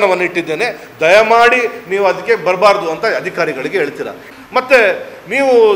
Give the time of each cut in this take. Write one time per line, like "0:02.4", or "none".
0:04.2

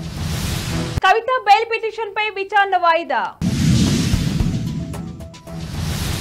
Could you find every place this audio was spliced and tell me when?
0:01.0

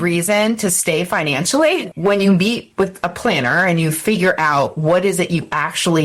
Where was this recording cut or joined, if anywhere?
0:01.9

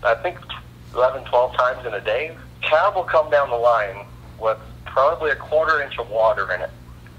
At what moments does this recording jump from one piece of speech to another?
0:02.4

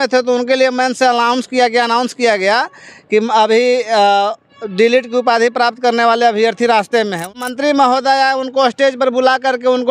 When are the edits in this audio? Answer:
0:07.4

